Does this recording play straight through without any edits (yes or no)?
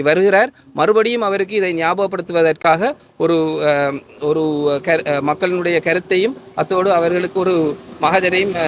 yes